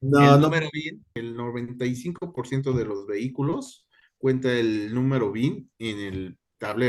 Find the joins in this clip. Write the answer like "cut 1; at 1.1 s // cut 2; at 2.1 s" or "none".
cut 1; at 1.1 s